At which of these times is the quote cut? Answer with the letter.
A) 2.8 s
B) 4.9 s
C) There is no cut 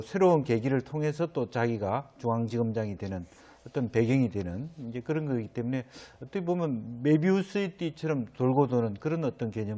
B